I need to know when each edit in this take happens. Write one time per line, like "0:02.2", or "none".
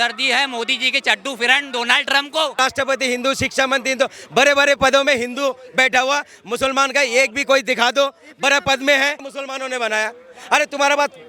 0:02.6
0:09.4